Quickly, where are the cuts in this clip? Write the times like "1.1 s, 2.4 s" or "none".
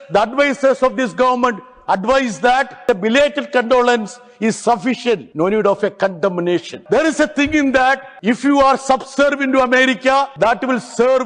2.8 s, 5.3 s, 6.7 s, 8.1 s, 10.3 s